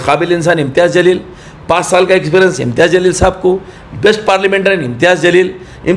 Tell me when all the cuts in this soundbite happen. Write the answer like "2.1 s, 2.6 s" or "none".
none